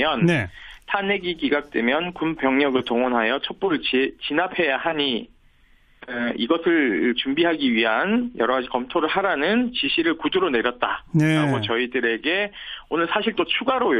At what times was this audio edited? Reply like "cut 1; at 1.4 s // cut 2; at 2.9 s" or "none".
cut 1; at 13.0 s